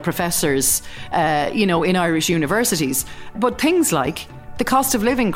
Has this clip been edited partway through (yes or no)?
yes